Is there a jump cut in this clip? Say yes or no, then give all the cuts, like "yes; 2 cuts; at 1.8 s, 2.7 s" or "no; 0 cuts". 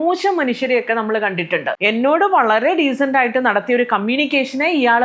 yes; 1 cut; at 1.7 s